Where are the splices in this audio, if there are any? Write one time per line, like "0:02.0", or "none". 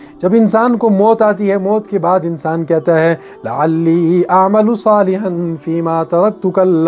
none